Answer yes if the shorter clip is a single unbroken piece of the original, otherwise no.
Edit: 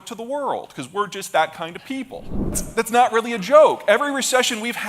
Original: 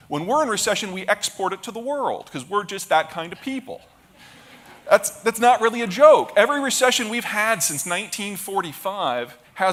no